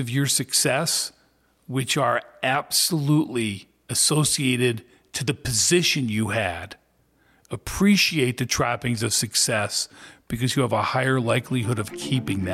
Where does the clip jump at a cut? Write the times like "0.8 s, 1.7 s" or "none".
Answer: none